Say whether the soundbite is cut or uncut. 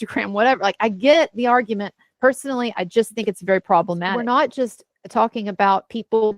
cut